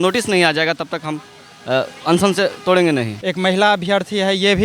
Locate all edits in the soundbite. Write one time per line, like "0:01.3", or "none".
0:03.2